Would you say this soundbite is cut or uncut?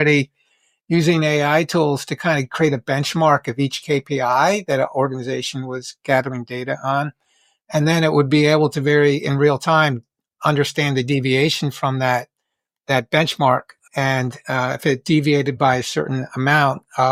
uncut